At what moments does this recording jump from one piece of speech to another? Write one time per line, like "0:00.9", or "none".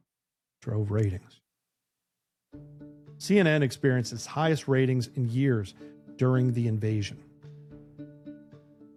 none